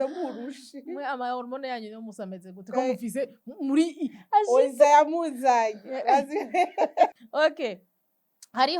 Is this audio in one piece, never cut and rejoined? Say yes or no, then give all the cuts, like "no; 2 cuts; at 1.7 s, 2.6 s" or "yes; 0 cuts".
no; 1 cut; at 7.1 s